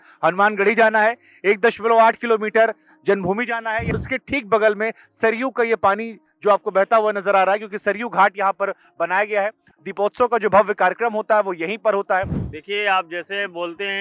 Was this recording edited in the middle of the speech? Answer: yes; 2 cuts; at 3.9 s, 12.4 s

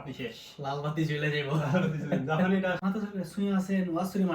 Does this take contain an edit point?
yes; 1 cut; at 2.8 s

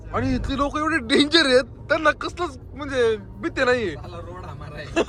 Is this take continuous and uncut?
yes; 0 cuts

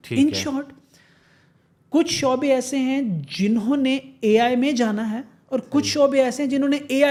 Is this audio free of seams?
yes; 0 cuts

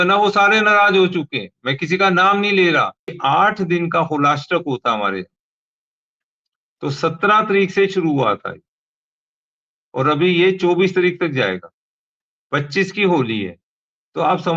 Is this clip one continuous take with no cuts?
no; 1 cut; at 3.2 s

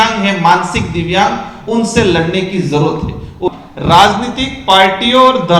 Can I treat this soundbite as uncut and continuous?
no; 1 cut; at 3.5 s

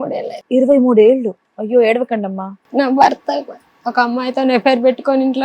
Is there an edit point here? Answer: yes; 1 cut; at 2.6 s

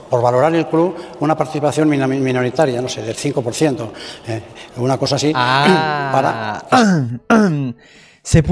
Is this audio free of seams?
yes; 0 cuts

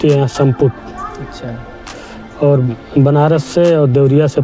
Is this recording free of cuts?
yes; 0 cuts

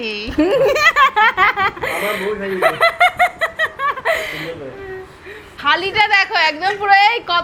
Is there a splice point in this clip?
no; 0 cuts

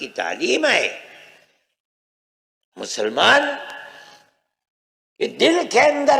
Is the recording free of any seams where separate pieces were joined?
yes; 0 cuts

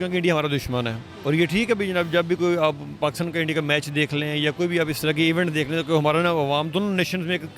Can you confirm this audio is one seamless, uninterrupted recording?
yes; 0 cuts

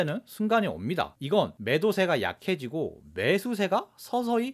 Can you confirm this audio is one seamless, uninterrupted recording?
yes; 0 cuts

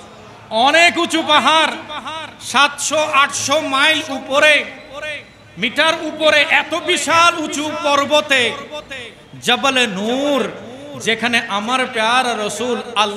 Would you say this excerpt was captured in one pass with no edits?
yes; 0 cuts

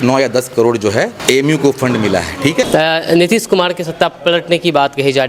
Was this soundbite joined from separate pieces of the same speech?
yes; 2 cuts; at 1.2 s, 2.6 s

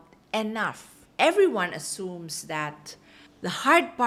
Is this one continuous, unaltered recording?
yes; 0 cuts

